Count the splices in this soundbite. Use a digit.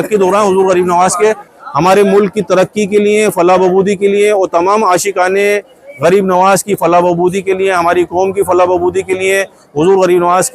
1